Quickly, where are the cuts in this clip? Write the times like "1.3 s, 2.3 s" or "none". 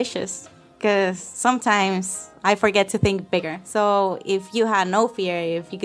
3.6 s